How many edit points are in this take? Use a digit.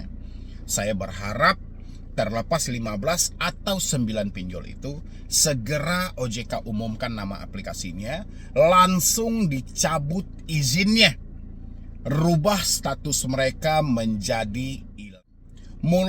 1